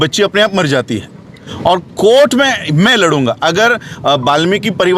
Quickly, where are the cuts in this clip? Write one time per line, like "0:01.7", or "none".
0:01.4